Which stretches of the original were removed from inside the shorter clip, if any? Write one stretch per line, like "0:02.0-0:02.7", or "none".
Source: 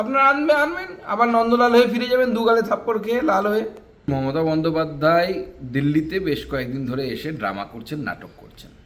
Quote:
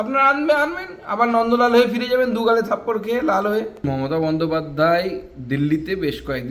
0:03.8-0:04.0